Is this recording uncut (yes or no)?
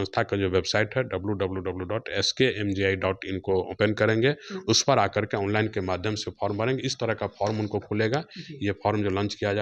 yes